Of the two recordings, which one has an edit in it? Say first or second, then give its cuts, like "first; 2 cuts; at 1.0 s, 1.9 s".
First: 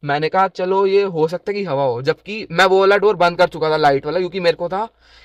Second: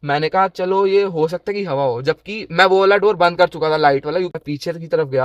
second; 1 cut; at 4.3 s